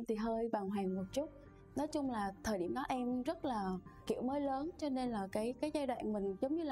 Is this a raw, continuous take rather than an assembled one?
yes; 0 cuts

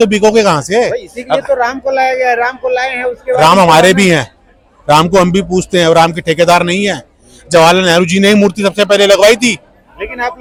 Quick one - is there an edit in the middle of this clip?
no; 0 cuts

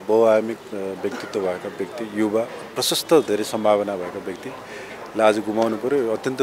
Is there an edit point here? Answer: no; 0 cuts

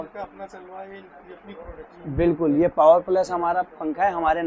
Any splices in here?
no; 0 cuts

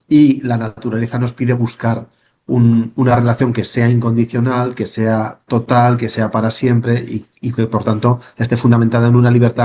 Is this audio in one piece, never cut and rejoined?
yes; 0 cuts

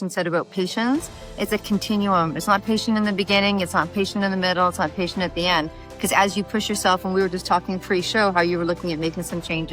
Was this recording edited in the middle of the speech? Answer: no; 0 cuts

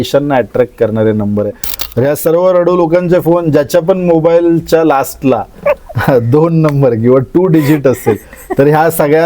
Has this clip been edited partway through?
yes; 1 cut; at 1.7 s

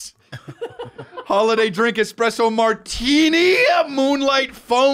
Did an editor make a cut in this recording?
no; 0 cuts

